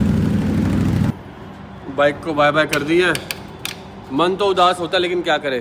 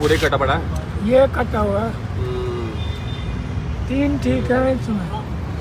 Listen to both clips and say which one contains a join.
first; 1 cut; at 1.1 s

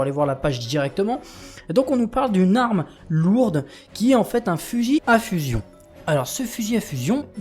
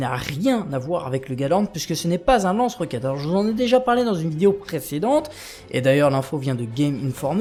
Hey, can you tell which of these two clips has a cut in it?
first; 1 cut; at 1.6 s

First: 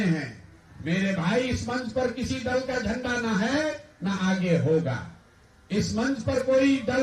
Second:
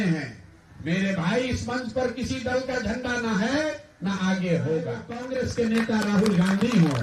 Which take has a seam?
second; 1 cut; at 5.2 s

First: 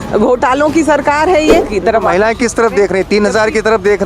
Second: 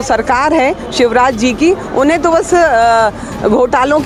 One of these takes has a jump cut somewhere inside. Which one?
first; 1 cut; at 1.7 s

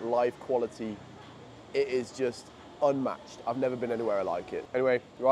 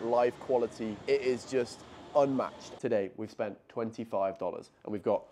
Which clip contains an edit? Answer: second; 2 cuts; at 1.0 s, 2.7 s

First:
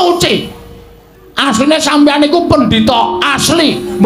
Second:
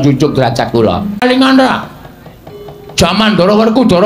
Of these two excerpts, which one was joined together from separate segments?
second; 1 cut; at 1.2 s

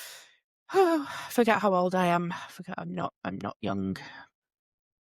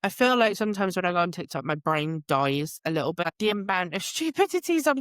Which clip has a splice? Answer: second; 1 cut; at 3.2 s

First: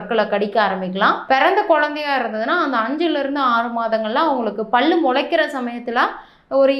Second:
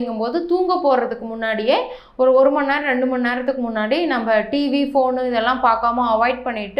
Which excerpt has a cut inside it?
first; 1 cut; at 1.2 s

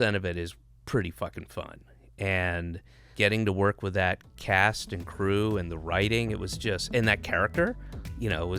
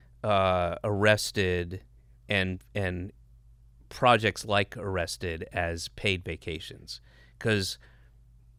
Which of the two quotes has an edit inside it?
first; 1 cut; at 3.0 s

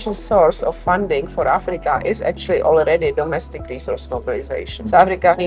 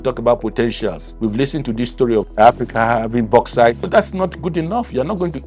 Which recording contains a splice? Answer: second; 1 cut; at 1.1 s

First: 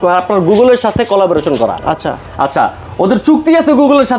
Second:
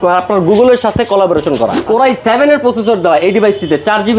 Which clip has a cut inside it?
second; 1 cut; at 1.8 s

